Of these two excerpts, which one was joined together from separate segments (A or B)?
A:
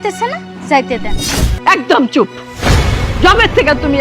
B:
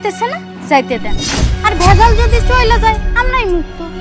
A